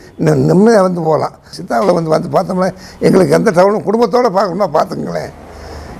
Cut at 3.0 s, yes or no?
no